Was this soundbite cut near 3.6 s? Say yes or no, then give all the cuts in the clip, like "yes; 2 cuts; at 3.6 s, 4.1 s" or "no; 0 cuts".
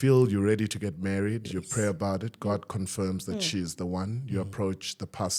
no; 0 cuts